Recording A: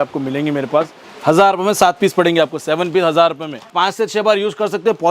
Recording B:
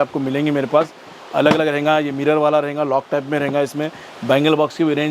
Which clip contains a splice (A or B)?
A